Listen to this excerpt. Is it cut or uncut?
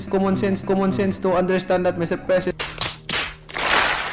uncut